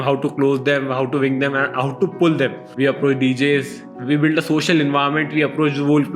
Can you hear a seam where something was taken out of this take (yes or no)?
yes